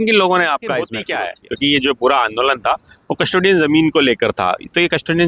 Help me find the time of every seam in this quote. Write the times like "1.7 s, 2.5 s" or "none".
1.0 s